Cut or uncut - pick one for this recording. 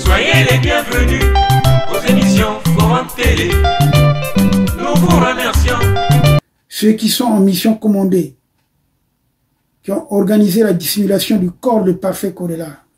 cut